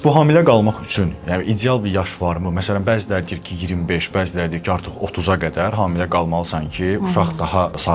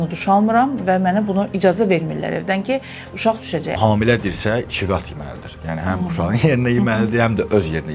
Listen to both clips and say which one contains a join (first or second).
second